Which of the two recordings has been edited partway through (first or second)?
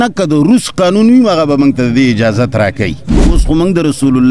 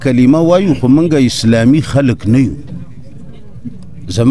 first